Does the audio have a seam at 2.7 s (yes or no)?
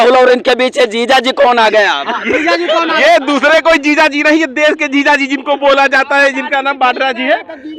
no